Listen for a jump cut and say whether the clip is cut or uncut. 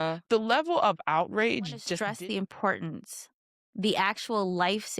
cut